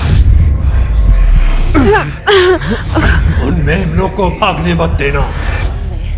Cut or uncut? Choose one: uncut